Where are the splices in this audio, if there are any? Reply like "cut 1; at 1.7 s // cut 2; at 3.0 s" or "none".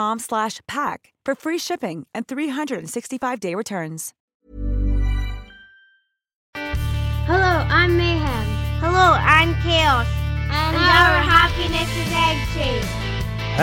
cut 1; at 4.1 s // cut 2; at 6.6 s